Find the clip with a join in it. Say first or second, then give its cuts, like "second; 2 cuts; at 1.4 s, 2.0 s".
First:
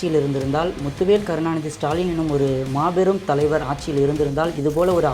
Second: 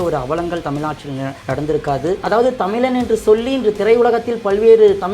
second; 2 cuts; at 1.3 s, 2.2 s